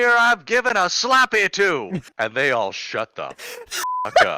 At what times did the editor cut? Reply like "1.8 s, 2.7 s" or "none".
2.1 s